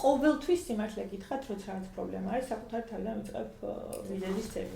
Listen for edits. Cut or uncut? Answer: uncut